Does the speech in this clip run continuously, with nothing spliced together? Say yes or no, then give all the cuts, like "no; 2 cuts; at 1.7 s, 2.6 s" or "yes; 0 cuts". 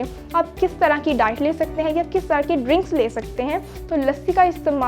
no; 1 cut; at 3.7 s